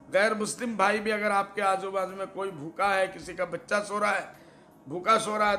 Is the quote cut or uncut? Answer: uncut